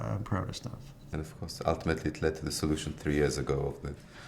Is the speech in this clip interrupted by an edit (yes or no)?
yes